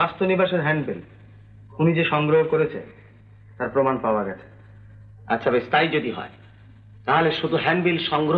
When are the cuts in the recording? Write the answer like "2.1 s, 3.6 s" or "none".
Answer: none